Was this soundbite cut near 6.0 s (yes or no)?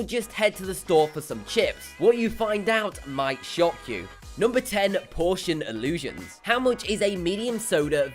no